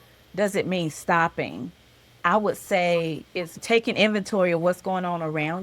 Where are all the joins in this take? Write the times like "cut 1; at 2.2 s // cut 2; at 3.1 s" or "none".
cut 1; at 2.1 s // cut 2; at 3.6 s